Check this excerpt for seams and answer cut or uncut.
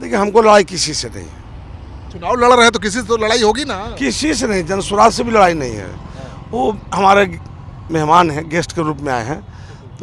uncut